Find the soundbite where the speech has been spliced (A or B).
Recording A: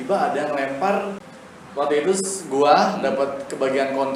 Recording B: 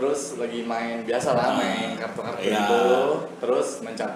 A